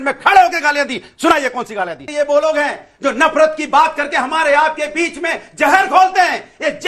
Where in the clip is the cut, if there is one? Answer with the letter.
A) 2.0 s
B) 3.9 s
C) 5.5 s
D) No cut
A